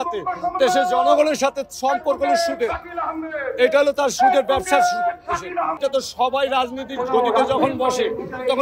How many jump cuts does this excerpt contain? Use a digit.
1